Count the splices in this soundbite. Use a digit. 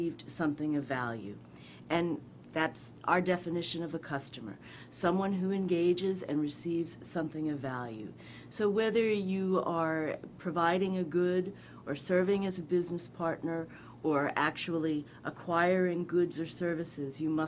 0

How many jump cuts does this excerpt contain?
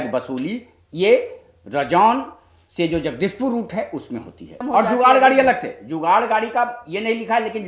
1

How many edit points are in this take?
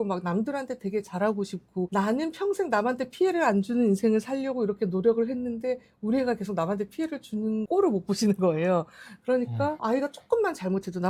0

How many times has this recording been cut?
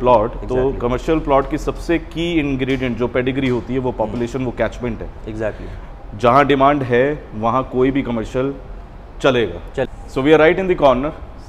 1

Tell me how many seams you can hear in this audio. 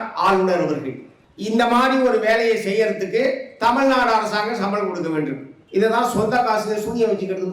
1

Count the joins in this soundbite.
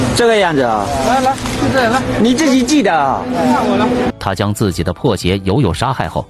1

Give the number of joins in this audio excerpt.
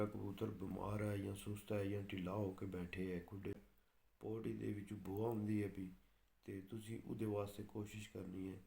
1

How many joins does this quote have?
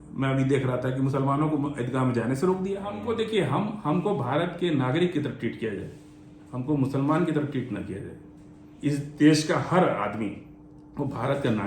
1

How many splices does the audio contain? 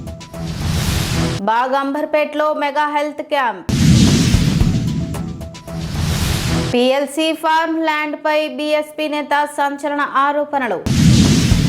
1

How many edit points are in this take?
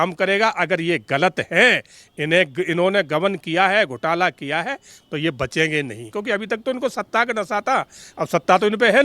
1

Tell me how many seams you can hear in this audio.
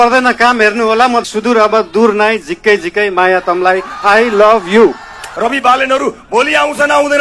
2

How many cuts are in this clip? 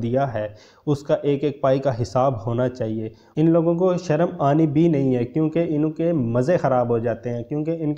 1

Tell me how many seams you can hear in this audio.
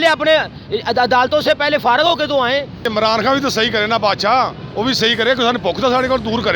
1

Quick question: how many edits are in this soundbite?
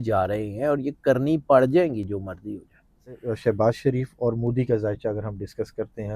1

